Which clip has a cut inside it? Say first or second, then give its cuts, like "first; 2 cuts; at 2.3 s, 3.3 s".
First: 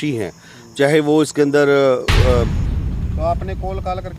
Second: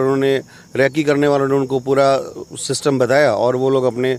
first; 1 cut; at 2.6 s